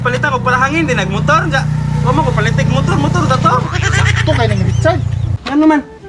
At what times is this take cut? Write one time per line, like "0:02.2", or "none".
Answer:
none